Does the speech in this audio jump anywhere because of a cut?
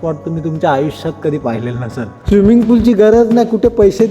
yes; 1 cut; at 2.1 s

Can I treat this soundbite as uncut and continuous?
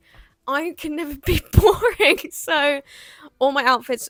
yes; 0 cuts

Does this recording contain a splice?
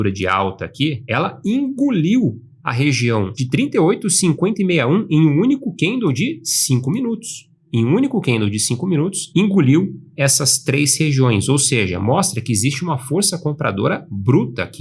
yes; 2 cuts; at 1.0 s, 3.4 s

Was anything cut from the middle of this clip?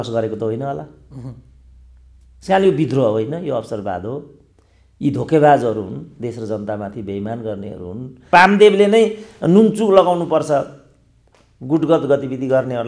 yes; 1 cut; at 8.3 s

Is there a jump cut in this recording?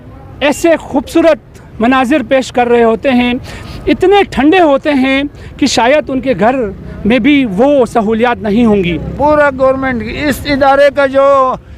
yes; 1 cut; at 9.1 s

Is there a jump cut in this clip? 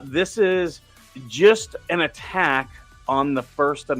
no; 0 cuts

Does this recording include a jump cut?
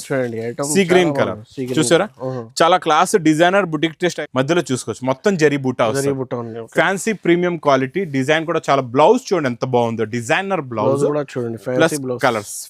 yes; 1 cut; at 4.2 s

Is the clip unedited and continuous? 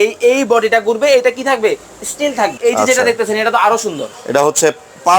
no; 1 cut; at 2.6 s

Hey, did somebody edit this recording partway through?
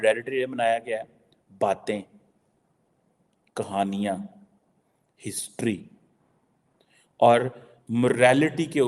no; 0 cuts

